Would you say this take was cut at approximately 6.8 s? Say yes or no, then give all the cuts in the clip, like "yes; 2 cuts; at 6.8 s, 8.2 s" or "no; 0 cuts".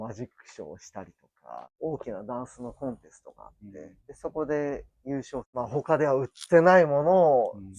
no; 3 cuts; at 1.6 s, 4.0 s, 5.5 s